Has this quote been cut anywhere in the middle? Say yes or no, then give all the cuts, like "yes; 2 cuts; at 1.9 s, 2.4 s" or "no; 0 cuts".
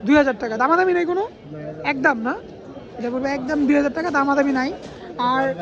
no; 0 cuts